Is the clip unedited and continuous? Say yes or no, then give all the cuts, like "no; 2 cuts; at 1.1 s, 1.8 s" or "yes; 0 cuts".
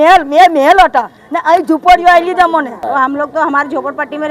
no; 1 cut; at 2.8 s